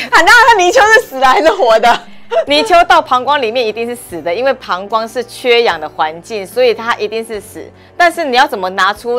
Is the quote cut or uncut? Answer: uncut